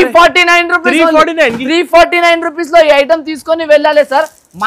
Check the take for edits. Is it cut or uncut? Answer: uncut